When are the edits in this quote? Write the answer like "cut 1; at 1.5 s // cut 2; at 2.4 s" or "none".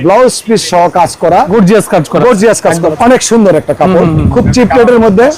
cut 1; at 1.5 s // cut 2; at 2.9 s